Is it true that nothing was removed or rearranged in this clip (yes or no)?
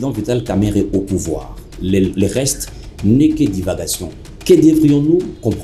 yes